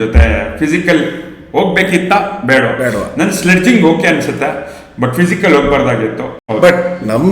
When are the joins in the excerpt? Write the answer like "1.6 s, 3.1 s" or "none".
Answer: 6.4 s